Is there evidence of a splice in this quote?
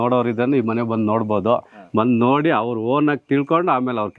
no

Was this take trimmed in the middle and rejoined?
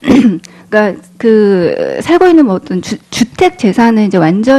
yes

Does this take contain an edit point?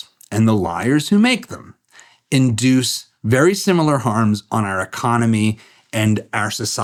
no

